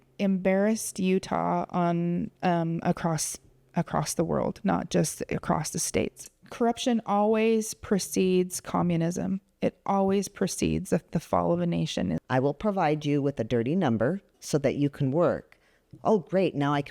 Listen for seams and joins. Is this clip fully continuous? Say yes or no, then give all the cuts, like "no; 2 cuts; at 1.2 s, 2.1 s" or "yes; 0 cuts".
no; 2 cuts; at 6.2 s, 12.2 s